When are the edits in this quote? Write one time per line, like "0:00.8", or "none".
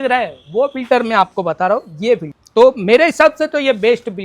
0:02.4